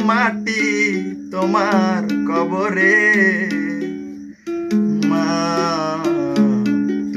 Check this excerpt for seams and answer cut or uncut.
uncut